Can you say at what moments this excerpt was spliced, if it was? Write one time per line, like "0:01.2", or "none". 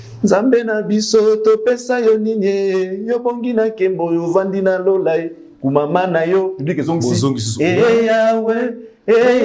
none